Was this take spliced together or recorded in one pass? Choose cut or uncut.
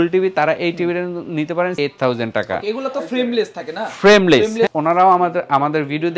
cut